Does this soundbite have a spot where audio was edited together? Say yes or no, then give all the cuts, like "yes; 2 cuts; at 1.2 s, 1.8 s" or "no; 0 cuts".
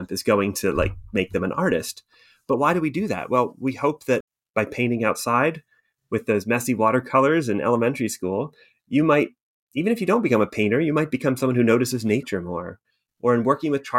yes; 1 cut; at 4.3 s